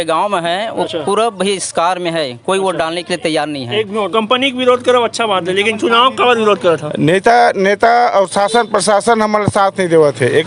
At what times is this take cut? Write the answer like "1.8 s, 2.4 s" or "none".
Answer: 4.1 s